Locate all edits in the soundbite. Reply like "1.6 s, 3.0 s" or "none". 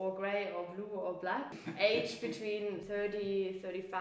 1.6 s, 2.8 s